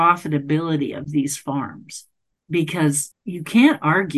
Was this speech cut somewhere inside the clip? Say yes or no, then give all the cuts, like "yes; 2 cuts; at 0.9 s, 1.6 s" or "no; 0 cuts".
yes; 1 cut; at 3.1 s